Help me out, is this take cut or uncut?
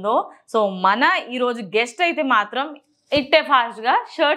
uncut